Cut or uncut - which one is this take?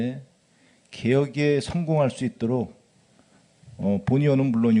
uncut